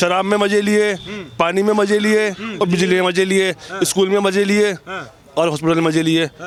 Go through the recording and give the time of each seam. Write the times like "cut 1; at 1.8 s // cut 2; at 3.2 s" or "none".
none